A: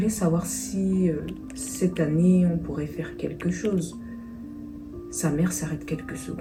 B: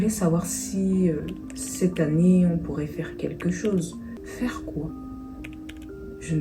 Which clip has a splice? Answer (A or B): B